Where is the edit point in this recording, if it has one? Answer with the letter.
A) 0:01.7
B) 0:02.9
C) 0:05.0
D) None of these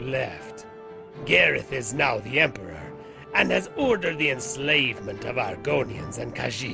D